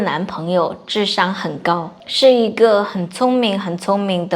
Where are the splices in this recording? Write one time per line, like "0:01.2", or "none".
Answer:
0:02.0

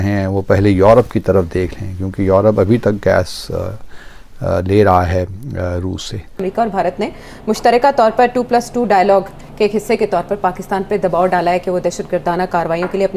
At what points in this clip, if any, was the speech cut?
0:06.3

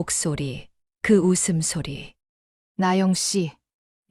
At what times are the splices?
0:02.6

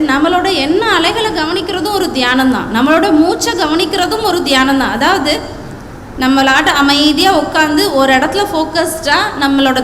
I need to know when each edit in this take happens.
none

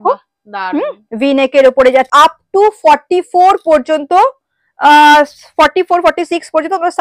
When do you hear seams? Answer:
0:02.1

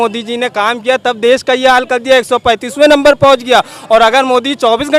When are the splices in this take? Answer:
none

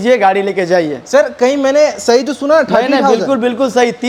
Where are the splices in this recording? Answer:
none

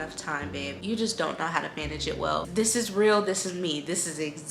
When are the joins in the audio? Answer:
0:02.4

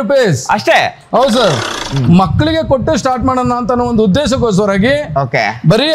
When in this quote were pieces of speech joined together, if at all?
0:01.8

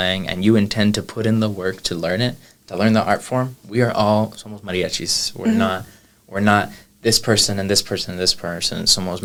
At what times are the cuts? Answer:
none

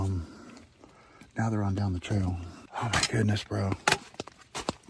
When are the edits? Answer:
none

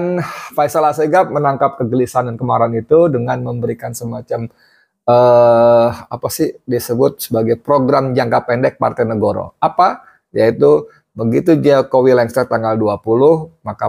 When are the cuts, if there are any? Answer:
none

